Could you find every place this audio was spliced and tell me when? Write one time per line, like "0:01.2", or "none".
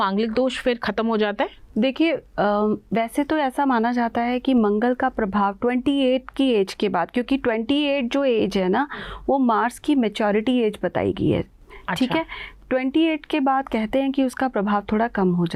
none